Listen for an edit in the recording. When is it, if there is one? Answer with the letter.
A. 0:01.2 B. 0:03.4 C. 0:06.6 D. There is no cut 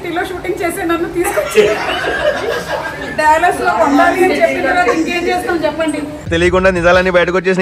D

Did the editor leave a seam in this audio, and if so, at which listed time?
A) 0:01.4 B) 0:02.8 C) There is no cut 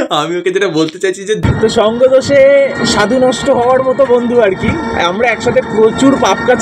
A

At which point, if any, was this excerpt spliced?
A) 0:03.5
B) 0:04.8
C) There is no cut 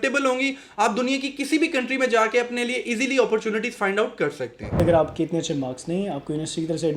B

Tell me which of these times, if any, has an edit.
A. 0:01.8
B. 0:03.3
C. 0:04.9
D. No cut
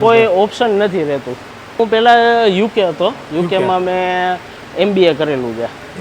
A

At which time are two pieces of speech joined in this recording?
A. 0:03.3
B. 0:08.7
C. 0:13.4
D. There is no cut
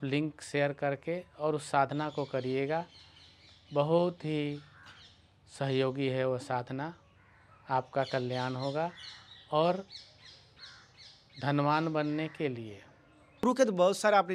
C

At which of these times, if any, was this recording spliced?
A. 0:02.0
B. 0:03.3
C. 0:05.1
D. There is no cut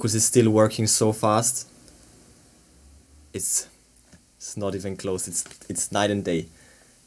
B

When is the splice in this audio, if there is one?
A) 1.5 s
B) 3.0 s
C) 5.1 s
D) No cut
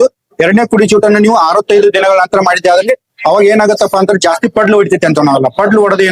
D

